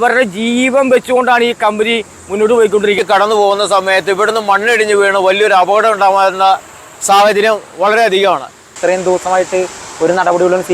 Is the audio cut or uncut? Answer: cut